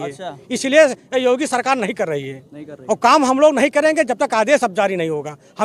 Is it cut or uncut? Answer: uncut